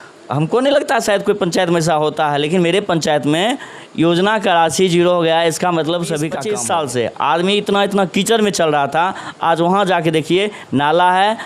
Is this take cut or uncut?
cut